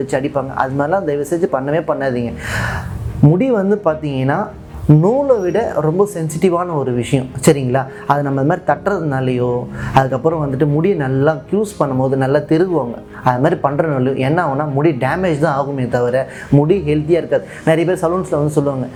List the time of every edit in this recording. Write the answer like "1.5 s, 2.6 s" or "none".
none